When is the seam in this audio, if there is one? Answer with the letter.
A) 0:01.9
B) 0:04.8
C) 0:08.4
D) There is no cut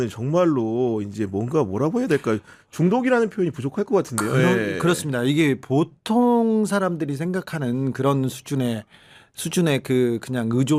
D